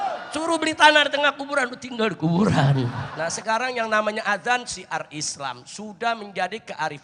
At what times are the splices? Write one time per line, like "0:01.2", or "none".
0:03.0